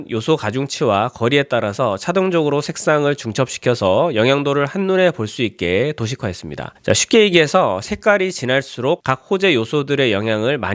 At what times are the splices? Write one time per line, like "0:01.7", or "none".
none